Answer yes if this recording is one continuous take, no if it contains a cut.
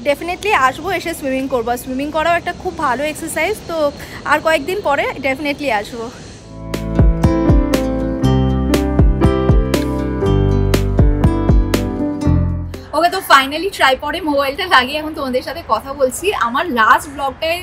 yes